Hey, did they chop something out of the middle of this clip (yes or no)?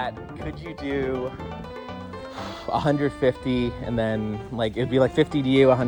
no